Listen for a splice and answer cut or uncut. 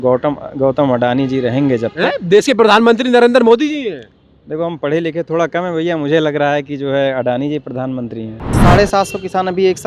cut